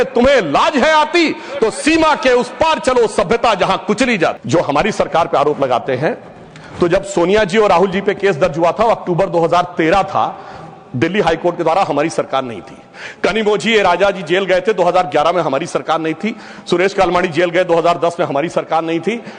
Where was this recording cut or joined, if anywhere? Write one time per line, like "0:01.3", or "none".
0:04.4